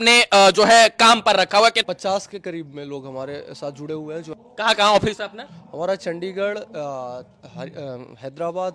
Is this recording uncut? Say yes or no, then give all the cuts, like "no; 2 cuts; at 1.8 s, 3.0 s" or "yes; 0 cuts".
no; 2 cuts; at 1.8 s, 4.3 s